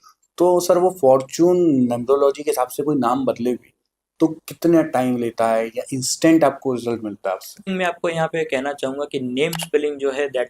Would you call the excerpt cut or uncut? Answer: cut